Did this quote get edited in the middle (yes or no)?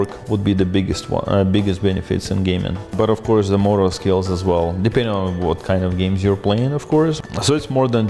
yes